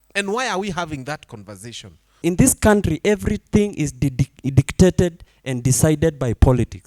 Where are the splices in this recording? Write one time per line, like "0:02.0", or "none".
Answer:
0:02.2